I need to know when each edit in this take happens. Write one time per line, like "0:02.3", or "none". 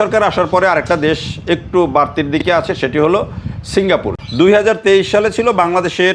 0:04.1